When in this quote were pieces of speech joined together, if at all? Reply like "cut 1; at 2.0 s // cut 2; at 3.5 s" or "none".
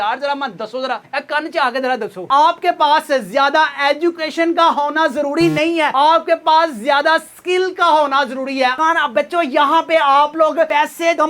cut 1; at 2.2 s // cut 2; at 8.8 s